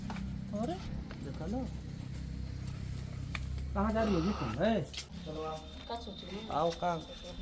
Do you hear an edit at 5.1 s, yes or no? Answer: yes